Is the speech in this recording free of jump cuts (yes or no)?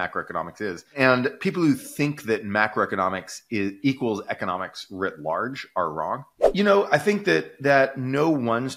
no